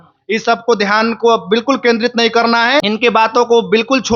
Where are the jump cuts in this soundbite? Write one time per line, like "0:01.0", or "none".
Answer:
0:02.8